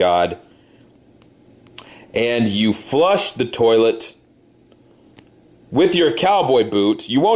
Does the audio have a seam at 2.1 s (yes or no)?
no